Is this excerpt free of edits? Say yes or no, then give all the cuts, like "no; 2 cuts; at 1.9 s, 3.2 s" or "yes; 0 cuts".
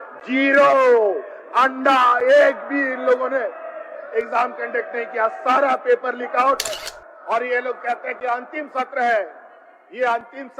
no; 1 cut; at 6.8 s